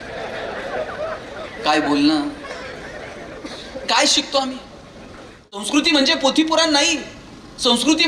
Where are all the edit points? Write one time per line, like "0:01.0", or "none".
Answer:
0:05.7